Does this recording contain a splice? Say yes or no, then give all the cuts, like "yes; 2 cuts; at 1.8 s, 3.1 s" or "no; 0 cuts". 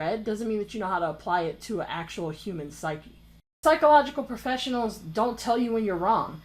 yes; 1 cut; at 3.5 s